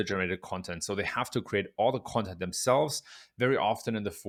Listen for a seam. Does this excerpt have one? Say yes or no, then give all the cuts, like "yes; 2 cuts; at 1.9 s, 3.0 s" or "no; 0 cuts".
no; 0 cuts